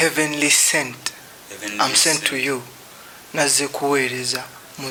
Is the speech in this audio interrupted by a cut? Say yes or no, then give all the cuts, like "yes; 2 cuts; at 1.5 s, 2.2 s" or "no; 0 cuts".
no; 0 cuts